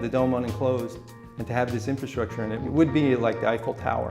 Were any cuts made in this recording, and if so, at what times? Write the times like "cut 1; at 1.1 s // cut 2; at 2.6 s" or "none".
cut 1; at 2.6 s